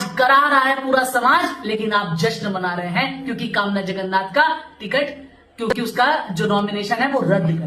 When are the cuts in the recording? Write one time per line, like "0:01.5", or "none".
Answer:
none